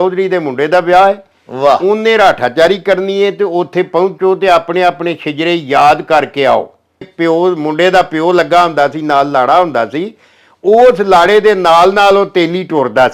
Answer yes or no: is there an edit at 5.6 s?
no